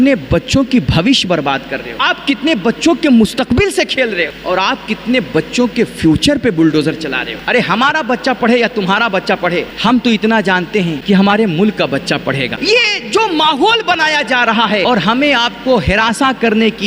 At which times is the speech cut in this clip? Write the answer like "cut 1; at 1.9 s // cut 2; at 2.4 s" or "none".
cut 1; at 1.9 s // cut 2; at 4.4 s // cut 3; at 7.3 s // cut 4; at 9.7 s // cut 5; at 11.0 s // cut 6; at 12.5 s // cut 7; at 14.8 s